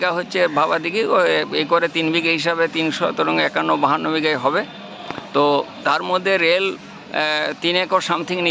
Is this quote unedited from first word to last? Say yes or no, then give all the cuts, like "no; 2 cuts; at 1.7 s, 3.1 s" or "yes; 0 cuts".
yes; 0 cuts